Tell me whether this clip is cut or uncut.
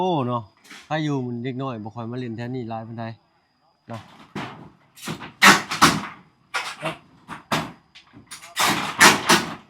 cut